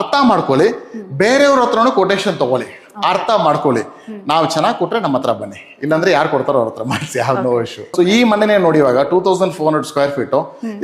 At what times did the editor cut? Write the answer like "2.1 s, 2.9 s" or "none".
7.8 s